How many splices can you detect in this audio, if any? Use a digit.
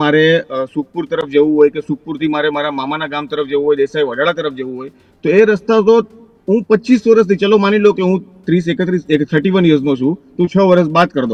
0